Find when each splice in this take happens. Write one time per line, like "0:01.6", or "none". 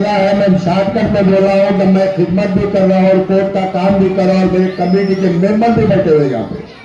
none